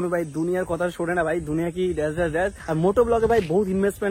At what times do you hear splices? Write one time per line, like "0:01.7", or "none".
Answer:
0:02.6